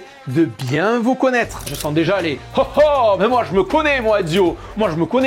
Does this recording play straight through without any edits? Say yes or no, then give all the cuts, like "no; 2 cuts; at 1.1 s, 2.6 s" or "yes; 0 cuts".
no; 1 cut; at 1.7 s